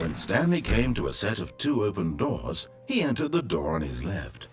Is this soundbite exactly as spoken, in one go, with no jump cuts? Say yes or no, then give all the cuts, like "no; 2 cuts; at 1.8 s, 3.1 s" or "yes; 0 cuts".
yes; 0 cuts